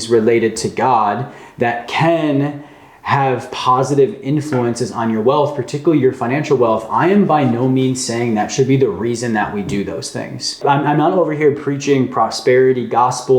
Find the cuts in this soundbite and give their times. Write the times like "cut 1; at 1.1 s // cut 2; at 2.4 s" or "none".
cut 1; at 10.6 s